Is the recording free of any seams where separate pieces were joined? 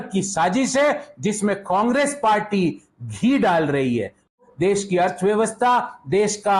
no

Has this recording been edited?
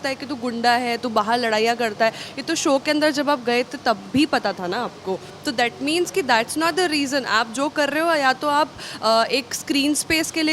no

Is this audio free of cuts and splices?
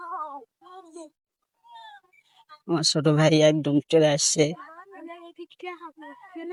yes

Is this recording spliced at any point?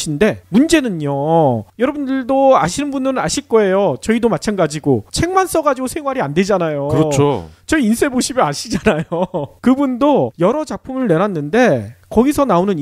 no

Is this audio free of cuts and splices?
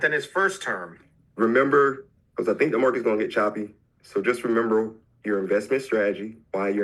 no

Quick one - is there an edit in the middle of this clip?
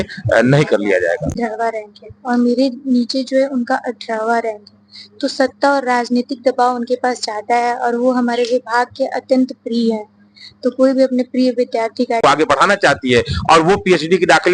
yes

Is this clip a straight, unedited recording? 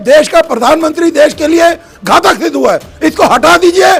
yes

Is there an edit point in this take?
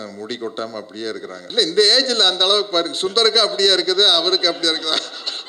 yes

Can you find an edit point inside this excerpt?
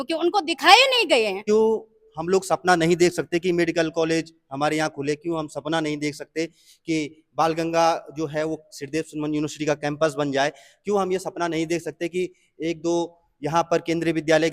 yes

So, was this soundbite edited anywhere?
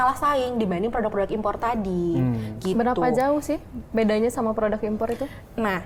no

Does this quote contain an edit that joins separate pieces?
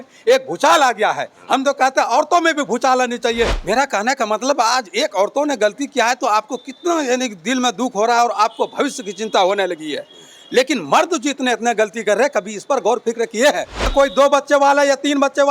yes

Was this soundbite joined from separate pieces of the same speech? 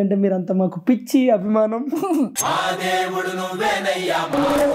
no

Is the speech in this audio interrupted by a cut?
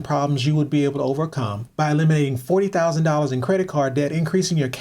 yes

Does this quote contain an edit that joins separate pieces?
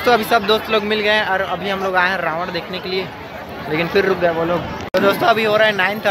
no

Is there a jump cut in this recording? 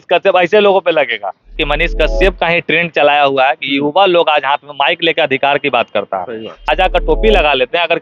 yes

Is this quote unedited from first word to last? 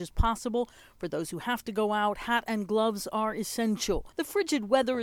no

